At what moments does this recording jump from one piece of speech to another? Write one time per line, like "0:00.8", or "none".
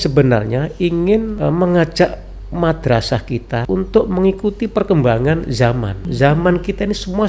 0:01.3
0:03.6
0:06.0